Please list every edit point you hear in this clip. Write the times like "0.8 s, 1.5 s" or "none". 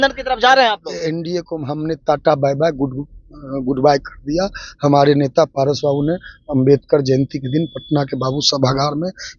none